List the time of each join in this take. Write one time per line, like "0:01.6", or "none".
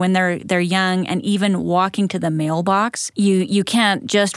0:03.0